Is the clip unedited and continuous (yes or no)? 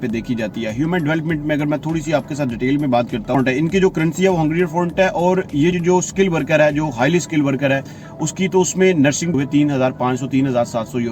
no